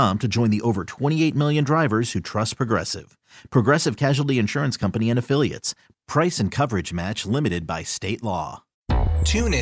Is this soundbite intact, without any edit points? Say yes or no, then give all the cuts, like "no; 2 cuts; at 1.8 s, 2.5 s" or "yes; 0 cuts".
no; 1 cut; at 8.7 s